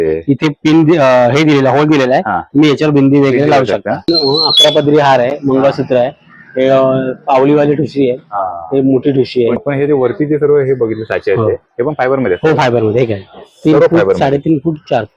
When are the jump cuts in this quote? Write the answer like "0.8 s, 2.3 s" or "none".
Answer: 4.1 s, 9.6 s